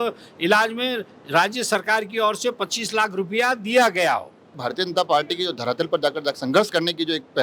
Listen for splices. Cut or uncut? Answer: cut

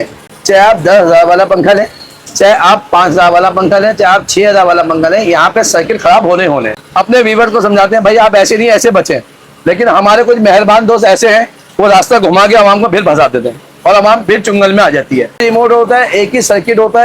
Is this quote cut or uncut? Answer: cut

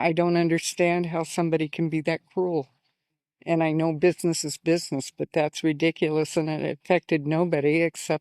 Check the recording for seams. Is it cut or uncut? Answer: uncut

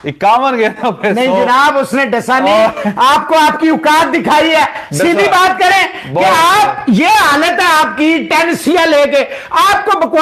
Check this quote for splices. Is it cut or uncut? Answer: uncut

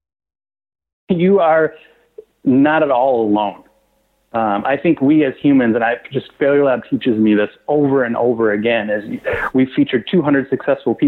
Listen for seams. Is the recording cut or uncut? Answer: cut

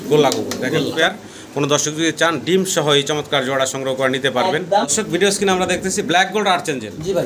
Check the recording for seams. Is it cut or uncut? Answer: cut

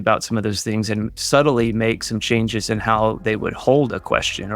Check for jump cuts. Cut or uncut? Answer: uncut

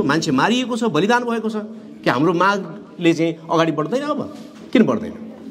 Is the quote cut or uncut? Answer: uncut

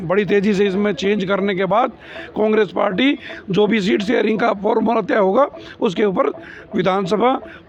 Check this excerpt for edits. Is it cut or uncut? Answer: uncut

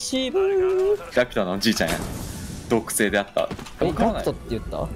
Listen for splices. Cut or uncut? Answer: cut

